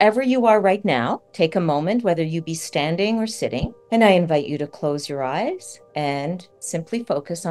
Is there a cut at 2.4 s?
no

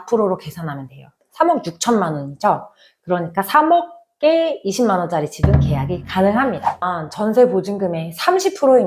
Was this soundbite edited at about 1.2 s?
yes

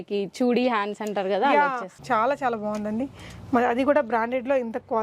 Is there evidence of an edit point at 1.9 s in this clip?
yes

